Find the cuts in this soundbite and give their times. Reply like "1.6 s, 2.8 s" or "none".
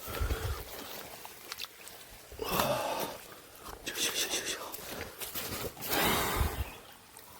5.4 s